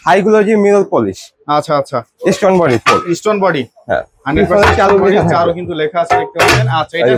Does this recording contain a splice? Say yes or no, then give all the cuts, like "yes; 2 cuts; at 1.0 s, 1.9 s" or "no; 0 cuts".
no; 0 cuts